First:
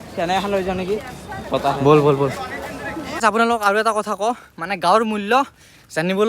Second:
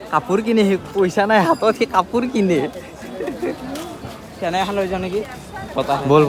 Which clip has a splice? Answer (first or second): first